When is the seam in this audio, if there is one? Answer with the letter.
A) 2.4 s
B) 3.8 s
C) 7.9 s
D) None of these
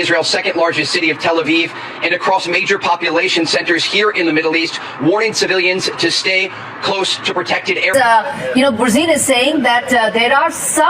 C